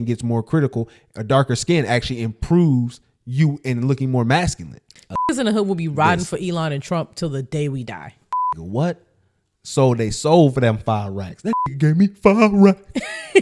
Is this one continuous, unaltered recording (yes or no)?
no